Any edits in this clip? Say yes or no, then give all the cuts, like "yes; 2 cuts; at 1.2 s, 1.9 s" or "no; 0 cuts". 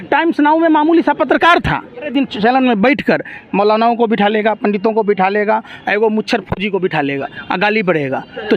yes; 1 cut; at 2.1 s